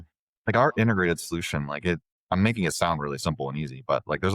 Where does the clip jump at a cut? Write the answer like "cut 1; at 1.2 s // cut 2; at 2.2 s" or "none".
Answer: cut 1; at 2.1 s